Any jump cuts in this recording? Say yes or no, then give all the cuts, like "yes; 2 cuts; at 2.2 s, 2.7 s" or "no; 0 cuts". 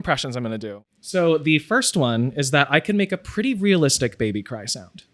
yes; 1 cut; at 0.9 s